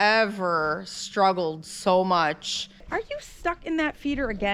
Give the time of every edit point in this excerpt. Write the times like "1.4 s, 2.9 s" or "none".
2.9 s